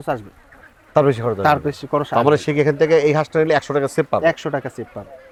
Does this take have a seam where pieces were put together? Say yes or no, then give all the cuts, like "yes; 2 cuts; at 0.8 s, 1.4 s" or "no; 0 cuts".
no; 0 cuts